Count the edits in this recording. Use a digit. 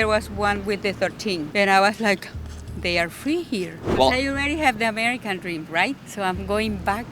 3